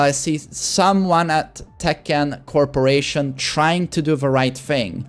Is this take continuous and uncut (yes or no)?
yes